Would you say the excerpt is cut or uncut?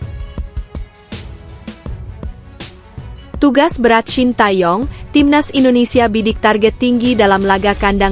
cut